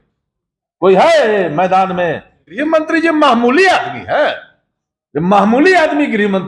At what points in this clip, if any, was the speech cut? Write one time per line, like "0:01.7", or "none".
0:02.6